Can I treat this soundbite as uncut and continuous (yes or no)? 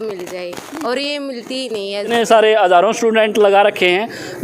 no